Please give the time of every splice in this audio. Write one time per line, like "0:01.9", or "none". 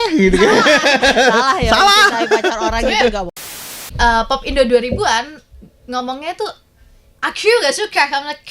0:03.8